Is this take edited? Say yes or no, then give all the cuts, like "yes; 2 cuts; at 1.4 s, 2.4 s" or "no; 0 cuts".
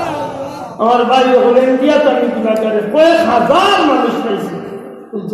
no; 0 cuts